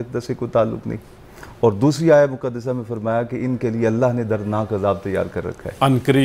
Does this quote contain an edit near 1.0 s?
no; 0 cuts

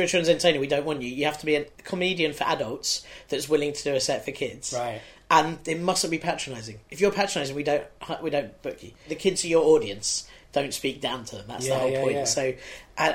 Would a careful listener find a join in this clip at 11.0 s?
no; 2 cuts; at 1.8 s, 9.1 s

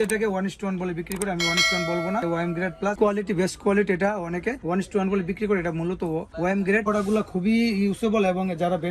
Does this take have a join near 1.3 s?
no; 2 cuts; at 3.0 s, 6.8 s

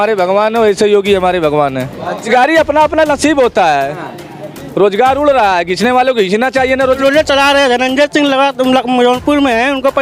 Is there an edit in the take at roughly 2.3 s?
yes; 2 cuts; at 2.3 s, 6.8 s

